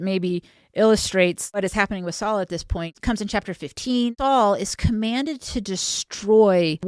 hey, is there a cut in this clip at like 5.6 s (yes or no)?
no